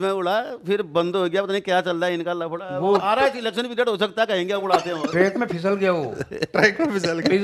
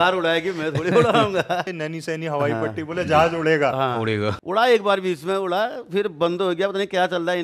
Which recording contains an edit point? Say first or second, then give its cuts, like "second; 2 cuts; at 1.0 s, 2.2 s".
second; 2 cuts; at 1.8 s, 4.3 s